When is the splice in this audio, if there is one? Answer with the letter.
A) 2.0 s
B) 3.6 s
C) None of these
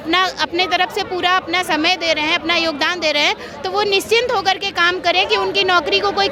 C